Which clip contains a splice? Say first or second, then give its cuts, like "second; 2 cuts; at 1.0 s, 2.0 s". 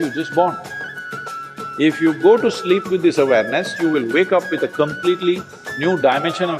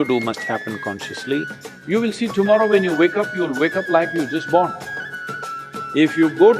second; 1 cut; at 1.9 s